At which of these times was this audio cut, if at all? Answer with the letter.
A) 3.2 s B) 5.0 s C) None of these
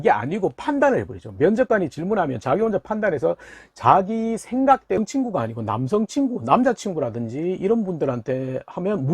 B